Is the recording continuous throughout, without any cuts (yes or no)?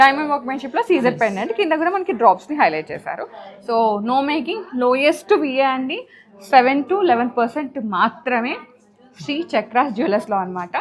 yes